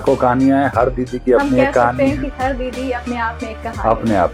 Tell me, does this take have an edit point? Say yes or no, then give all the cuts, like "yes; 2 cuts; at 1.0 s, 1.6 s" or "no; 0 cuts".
no; 0 cuts